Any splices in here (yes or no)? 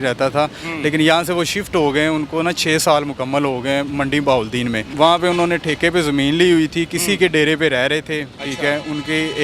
yes